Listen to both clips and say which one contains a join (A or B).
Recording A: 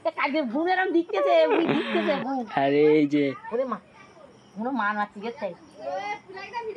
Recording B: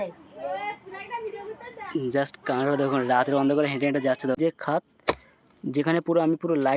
B